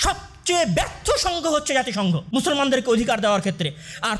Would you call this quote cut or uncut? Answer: cut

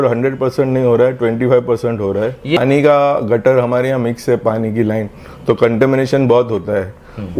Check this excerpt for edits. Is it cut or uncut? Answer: cut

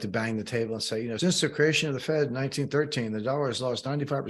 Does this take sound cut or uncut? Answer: cut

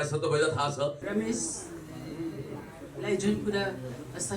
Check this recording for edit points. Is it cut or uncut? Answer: cut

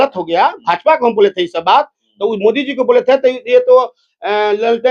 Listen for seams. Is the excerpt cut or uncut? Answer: uncut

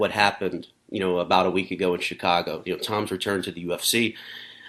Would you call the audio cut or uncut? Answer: uncut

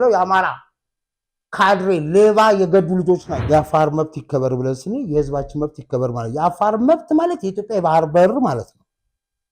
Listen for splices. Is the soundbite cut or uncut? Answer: cut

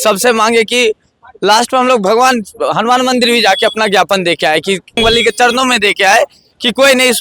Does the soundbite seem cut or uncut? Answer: cut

